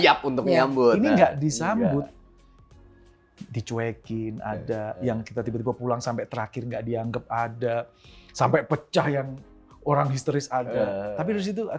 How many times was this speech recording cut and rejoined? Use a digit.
0